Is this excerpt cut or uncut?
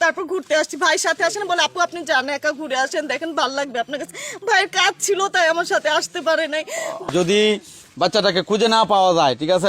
cut